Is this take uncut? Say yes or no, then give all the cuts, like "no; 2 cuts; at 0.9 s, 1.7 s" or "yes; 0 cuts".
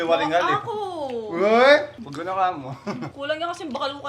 no; 2 cuts; at 2.0 s, 3.1 s